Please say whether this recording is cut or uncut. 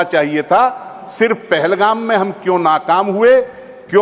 uncut